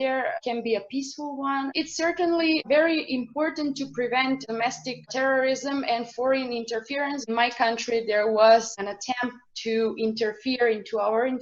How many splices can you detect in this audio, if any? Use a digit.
2